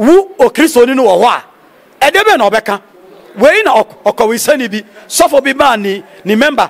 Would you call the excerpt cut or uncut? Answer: uncut